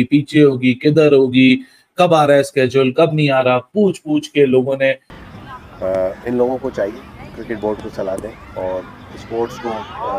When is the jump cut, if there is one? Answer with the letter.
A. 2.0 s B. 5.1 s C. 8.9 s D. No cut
B